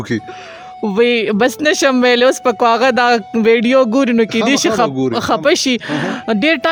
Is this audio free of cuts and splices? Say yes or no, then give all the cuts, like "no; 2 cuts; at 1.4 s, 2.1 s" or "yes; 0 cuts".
yes; 0 cuts